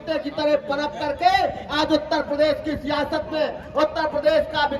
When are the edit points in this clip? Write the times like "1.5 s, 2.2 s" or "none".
none